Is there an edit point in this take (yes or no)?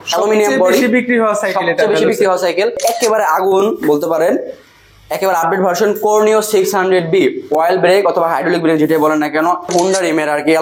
yes